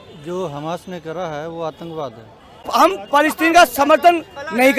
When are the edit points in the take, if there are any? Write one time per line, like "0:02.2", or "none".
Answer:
0:02.7